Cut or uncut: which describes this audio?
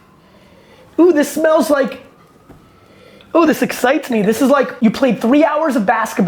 cut